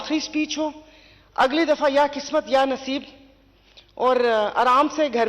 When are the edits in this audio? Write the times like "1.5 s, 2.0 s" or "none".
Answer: none